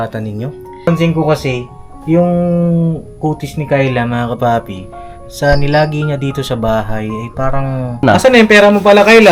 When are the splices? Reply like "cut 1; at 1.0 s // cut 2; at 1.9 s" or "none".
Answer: cut 1; at 0.9 s // cut 2; at 8.0 s